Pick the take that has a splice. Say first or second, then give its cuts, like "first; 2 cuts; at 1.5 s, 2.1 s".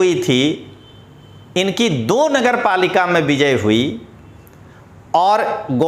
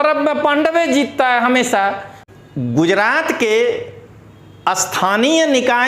second; 1 cut; at 2.2 s